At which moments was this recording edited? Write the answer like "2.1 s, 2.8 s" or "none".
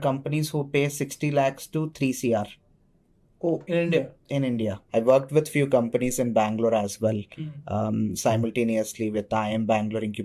4.8 s